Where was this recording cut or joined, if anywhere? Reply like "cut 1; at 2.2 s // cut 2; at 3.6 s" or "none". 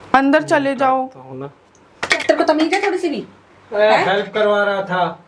cut 1; at 2.2 s